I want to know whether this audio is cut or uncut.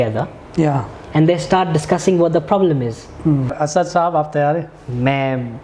cut